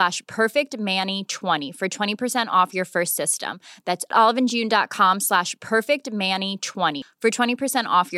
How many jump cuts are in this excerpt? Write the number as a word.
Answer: one